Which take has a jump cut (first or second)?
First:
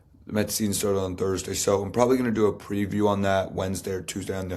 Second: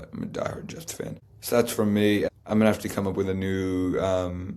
second